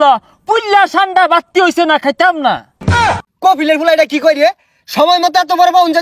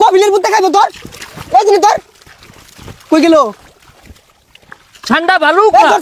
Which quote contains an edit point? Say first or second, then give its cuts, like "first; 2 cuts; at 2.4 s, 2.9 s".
first; 1 cut; at 2.9 s